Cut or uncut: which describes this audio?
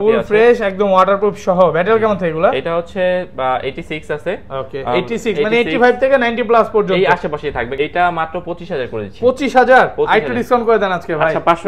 cut